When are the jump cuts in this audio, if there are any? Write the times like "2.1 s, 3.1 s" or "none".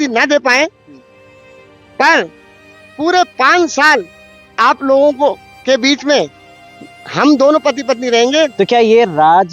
8.5 s